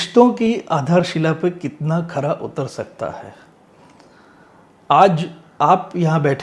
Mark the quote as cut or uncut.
uncut